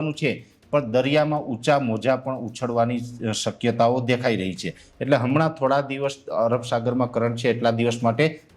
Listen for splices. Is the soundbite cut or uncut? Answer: uncut